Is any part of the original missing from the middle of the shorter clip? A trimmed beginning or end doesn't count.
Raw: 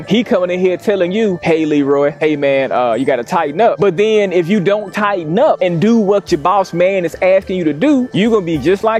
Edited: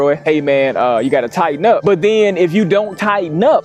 no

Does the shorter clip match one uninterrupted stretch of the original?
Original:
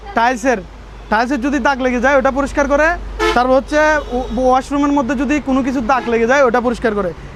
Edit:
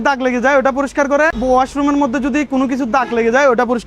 no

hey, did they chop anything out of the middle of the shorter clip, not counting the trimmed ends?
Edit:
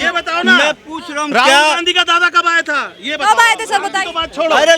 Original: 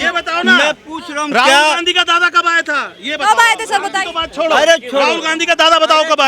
no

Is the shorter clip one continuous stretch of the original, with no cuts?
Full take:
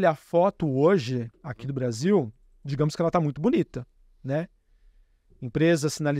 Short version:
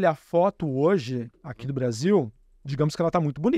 yes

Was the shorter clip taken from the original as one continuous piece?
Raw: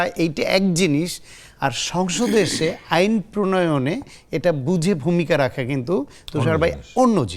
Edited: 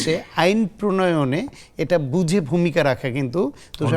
yes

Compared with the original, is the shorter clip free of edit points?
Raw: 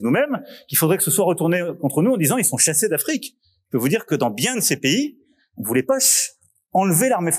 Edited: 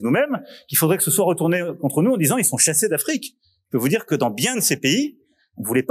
yes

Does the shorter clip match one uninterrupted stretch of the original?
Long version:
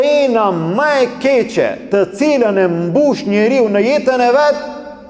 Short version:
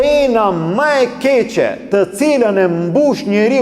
yes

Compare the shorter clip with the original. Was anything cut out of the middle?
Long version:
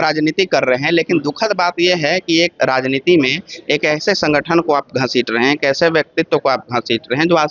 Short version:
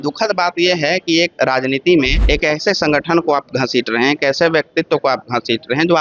yes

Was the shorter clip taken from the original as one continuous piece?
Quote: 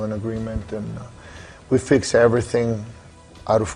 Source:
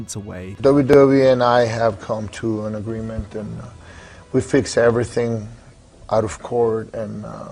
yes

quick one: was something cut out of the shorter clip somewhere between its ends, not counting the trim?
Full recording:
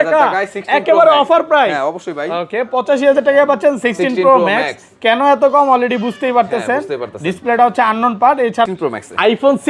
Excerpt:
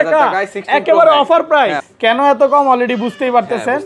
yes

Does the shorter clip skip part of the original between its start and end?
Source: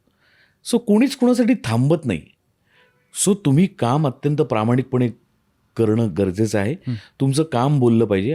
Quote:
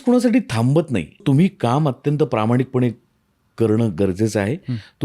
yes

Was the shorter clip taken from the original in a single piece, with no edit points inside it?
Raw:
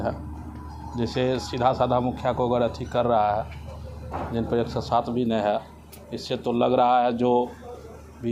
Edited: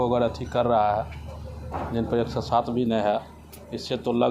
yes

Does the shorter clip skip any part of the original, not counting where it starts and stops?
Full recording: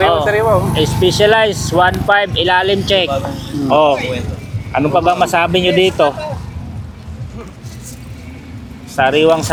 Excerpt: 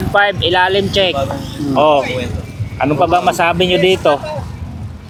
no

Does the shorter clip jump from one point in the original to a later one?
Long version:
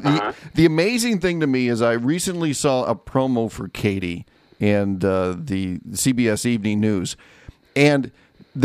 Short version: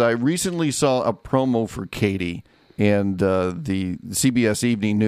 no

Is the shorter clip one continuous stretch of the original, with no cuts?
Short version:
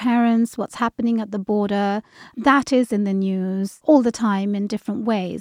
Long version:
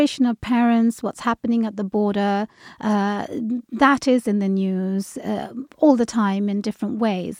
no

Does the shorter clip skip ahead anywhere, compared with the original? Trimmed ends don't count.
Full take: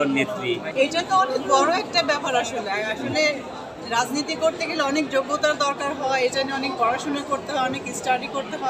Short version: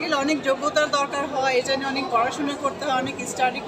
no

